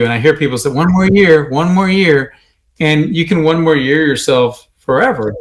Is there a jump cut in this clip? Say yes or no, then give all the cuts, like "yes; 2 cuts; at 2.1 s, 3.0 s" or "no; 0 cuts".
no; 0 cuts